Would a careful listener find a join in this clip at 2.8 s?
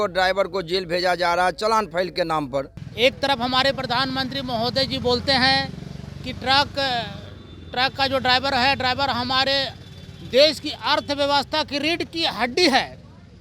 yes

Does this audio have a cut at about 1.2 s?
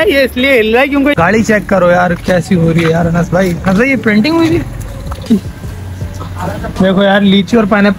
yes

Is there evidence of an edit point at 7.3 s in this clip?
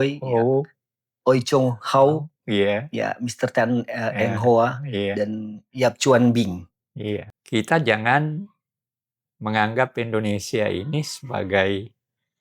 yes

